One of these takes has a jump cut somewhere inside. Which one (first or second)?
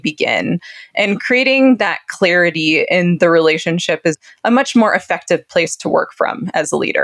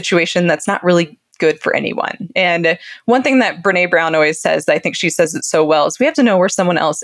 first